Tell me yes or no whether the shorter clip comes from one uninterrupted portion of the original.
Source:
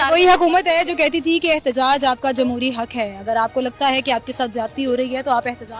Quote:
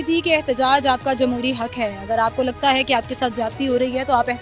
yes